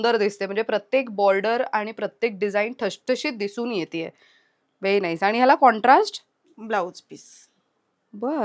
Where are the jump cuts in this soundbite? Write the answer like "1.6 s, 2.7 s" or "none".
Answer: none